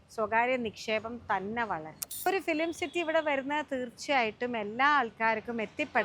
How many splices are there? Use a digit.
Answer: 1